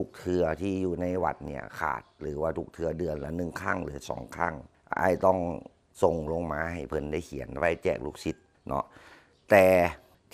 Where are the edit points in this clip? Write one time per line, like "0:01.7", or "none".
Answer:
none